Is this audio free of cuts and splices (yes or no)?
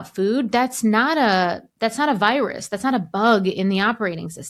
yes